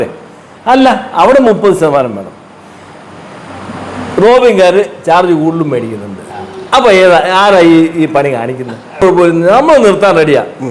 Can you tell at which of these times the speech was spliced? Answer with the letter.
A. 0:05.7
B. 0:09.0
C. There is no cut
B